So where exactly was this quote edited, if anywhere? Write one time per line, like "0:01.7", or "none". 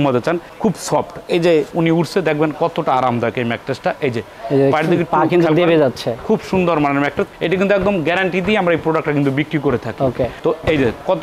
none